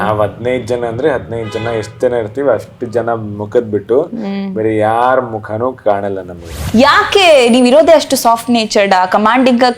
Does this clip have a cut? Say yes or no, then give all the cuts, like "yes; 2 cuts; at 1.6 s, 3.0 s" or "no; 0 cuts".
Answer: yes; 1 cut; at 6.6 s